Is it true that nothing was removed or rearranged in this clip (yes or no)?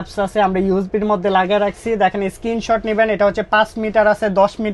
yes